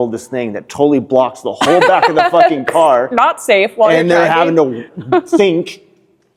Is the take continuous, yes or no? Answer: yes